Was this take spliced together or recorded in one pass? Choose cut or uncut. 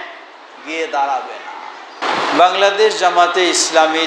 cut